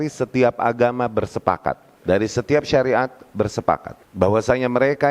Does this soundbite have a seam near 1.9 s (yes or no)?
yes